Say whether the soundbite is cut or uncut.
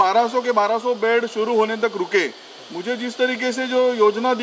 uncut